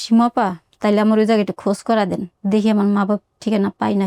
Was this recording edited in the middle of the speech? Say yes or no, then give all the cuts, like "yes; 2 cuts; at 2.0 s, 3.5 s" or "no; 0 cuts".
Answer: no; 0 cuts